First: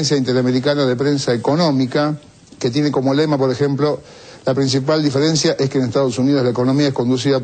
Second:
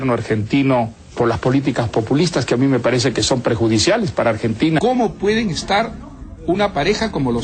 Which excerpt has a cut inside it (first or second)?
second